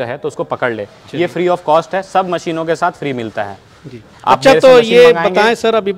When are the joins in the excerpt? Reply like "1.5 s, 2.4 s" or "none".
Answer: none

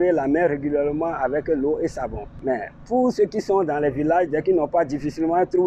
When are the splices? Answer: 2.2 s

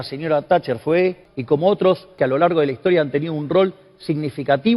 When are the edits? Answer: 1.3 s, 2.1 s

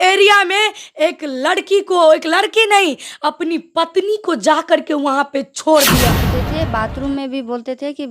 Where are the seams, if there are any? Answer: 6.3 s

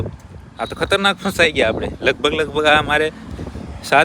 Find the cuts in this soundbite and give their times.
none

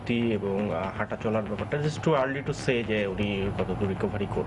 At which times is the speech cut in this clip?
none

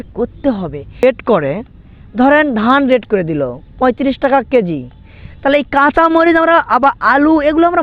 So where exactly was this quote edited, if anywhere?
1.0 s

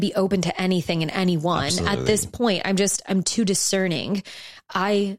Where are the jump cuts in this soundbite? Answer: none

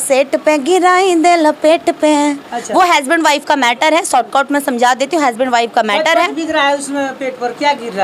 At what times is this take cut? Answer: none

